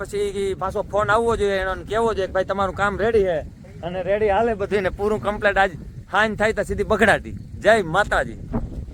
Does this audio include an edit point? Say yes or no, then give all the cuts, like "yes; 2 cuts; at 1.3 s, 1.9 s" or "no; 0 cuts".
no; 0 cuts